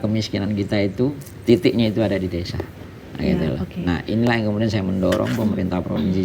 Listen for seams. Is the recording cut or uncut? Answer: uncut